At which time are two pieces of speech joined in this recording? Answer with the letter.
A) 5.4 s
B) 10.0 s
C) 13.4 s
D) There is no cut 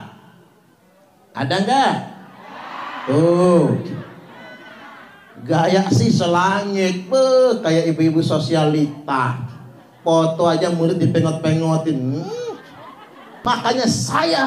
C